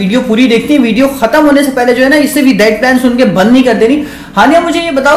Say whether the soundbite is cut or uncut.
uncut